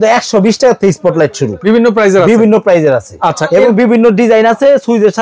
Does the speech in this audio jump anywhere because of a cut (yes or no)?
yes